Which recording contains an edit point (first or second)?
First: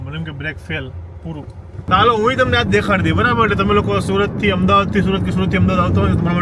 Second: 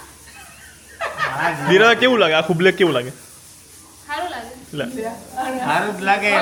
first